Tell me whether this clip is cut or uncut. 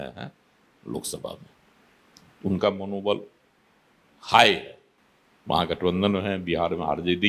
uncut